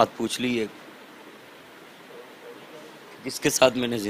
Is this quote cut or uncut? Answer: uncut